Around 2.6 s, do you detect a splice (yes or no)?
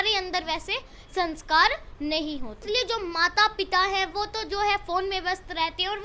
yes